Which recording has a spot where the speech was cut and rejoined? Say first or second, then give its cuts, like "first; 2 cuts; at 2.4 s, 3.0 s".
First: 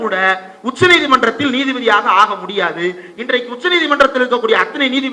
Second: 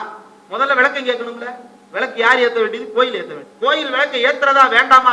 second; 1 cut; at 3.4 s